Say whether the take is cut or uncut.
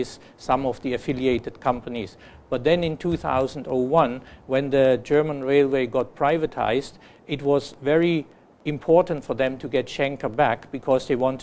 cut